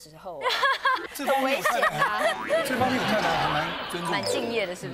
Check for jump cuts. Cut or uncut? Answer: cut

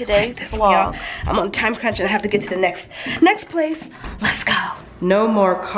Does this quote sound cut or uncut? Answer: cut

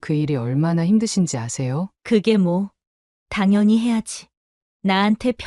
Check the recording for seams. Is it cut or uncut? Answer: cut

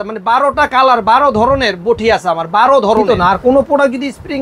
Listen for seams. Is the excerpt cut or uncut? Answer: cut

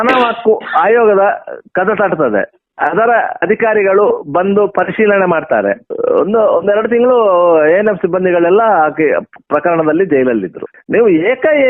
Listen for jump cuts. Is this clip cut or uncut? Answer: cut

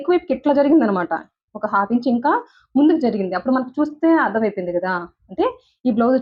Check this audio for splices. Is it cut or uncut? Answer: uncut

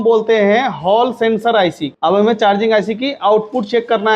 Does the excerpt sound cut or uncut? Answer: cut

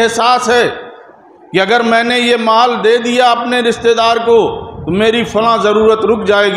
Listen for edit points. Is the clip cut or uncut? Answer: uncut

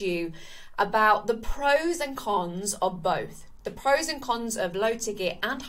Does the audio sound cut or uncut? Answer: uncut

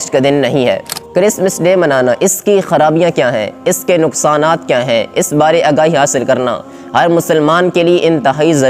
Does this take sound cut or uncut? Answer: cut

